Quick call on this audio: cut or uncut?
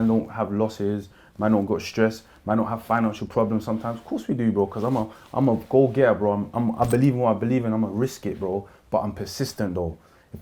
uncut